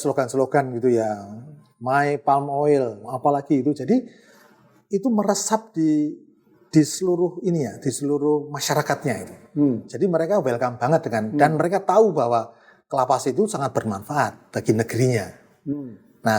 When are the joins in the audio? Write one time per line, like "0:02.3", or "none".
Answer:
none